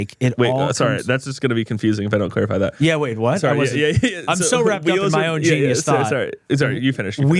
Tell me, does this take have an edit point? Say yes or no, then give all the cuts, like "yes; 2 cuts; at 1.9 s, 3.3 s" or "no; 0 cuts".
no; 0 cuts